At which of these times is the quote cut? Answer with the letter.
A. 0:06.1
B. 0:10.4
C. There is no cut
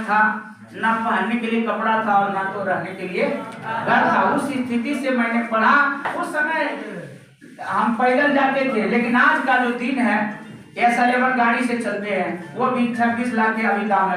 A